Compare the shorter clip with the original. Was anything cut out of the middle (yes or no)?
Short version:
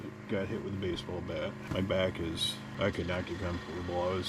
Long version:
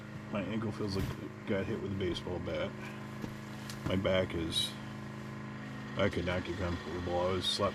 yes